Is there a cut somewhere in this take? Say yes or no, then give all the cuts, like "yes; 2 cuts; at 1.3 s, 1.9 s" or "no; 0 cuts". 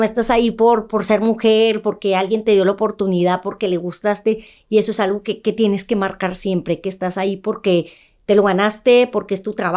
no; 0 cuts